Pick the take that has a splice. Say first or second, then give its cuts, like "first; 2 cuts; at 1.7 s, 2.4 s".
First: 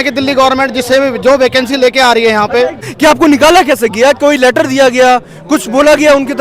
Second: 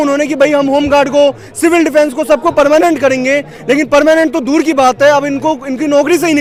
first; 1 cut; at 2.9 s